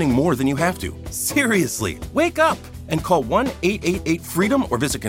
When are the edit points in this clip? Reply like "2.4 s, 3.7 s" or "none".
none